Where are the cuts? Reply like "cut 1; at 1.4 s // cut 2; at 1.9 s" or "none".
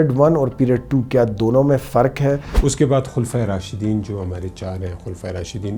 cut 1; at 2.5 s